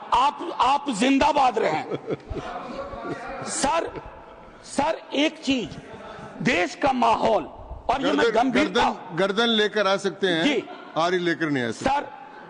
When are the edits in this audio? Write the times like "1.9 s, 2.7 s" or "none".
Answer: none